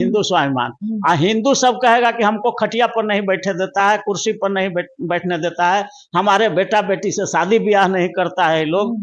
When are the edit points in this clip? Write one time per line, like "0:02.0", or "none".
none